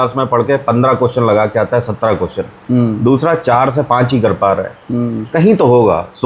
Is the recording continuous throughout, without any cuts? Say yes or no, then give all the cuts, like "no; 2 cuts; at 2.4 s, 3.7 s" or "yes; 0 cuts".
yes; 0 cuts